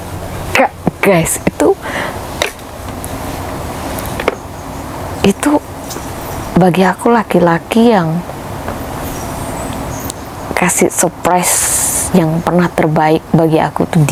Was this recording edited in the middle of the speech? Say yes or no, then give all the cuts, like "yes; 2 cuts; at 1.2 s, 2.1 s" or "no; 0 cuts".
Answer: no; 0 cuts